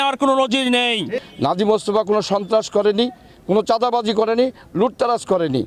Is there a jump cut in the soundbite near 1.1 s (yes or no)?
yes